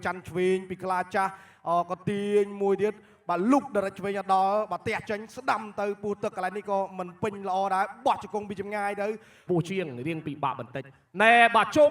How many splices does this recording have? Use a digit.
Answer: 1